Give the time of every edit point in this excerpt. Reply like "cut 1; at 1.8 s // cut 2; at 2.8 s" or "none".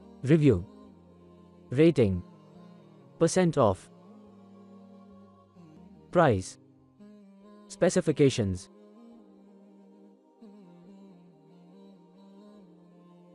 cut 1; at 3.8 s // cut 2; at 5.9 s // cut 3; at 8.6 s